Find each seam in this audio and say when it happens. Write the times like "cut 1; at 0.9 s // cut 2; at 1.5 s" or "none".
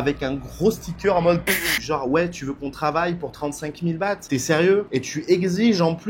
cut 1; at 1.7 s